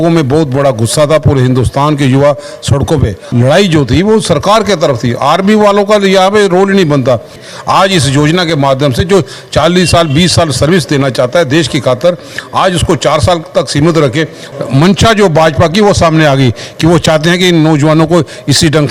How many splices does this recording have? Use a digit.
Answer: 3